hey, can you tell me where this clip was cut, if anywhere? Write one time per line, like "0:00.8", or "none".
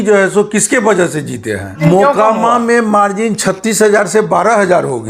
0:01.8